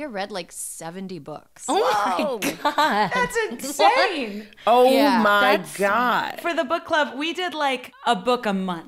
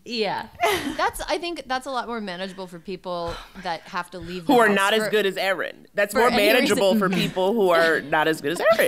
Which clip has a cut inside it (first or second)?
first